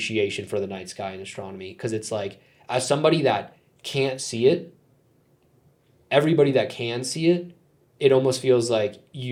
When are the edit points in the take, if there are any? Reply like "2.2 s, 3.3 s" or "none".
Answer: none